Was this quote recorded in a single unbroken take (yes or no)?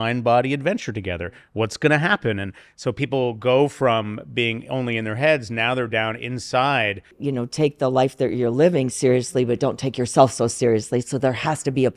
no